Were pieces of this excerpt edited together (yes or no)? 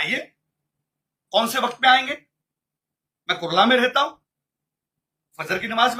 no